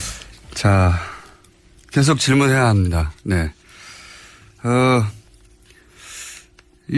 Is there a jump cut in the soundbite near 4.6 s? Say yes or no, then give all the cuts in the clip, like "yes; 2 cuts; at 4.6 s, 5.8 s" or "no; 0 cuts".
yes; 1 cut; at 4.6 s